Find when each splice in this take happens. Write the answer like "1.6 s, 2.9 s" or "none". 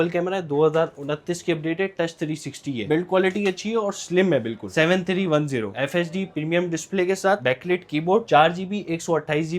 2.8 s, 4.7 s, 5.7 s